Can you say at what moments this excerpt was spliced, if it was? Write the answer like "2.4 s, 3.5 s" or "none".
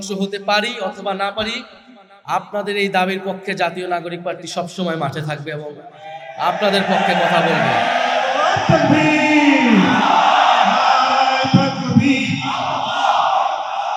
none